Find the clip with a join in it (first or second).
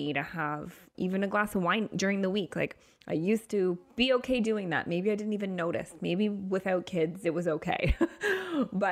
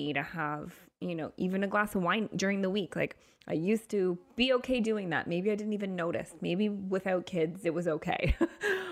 first